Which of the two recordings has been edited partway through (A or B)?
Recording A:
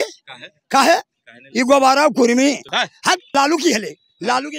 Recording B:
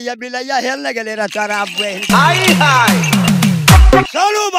A